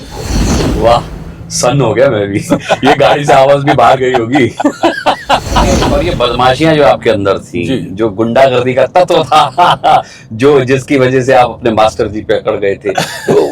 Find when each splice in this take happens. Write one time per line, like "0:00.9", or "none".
0:05.8

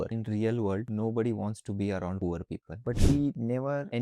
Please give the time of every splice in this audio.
0:02.7

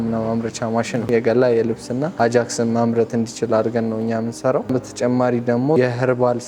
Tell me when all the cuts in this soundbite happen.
0:01.1
0:04.7
0:05.8

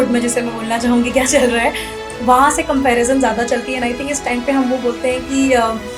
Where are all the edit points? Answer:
none

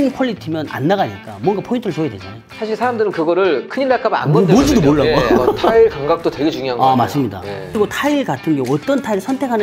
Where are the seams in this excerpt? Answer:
0:05.7
0:07.8

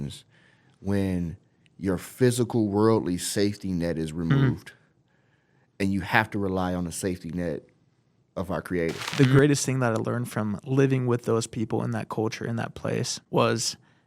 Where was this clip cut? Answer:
0:09.1
0:13.2

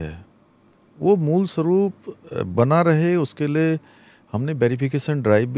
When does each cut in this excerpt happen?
none

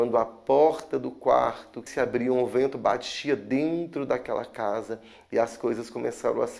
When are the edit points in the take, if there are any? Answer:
0:01.8

